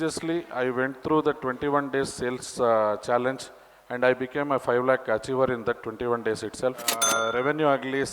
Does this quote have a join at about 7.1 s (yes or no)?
yes